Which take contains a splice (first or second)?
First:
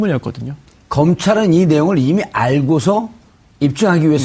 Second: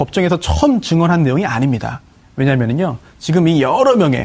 first